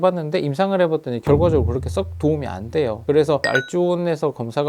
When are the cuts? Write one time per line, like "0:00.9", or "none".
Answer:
0:03.4

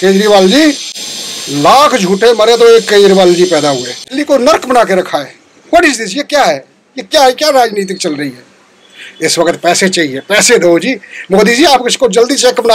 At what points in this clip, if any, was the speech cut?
0:04.0

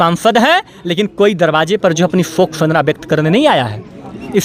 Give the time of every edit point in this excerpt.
none

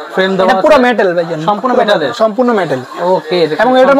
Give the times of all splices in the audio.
none

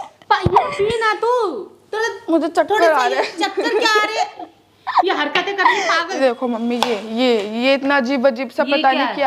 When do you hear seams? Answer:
0:06.1

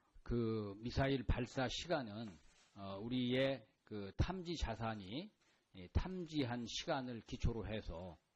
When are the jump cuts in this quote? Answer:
0:04.8

